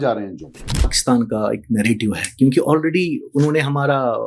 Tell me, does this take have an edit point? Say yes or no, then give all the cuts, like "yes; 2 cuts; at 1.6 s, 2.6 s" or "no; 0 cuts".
yes; 1 cut; at 0.9 s